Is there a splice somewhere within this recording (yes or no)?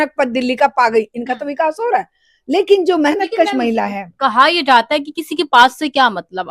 no